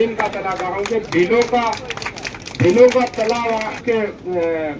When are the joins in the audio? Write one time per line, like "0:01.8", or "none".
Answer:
0:03.8